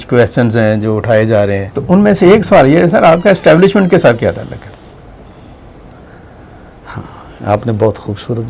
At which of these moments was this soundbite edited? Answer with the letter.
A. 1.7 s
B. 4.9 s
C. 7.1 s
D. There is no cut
A